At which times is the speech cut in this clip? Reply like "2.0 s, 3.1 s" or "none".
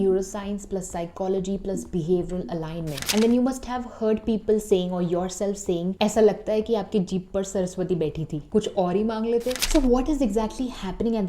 3.0 s, 9.6 s